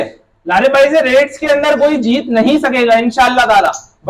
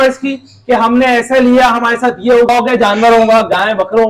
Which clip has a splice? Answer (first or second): second